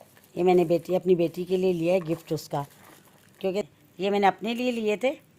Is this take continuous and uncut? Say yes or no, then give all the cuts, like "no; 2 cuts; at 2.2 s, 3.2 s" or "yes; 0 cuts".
no; 1 cut; at 3.6 s